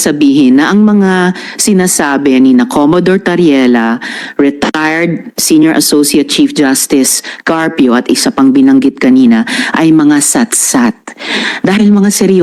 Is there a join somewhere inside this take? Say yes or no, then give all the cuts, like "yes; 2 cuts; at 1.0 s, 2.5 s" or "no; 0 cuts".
no; 0 cuts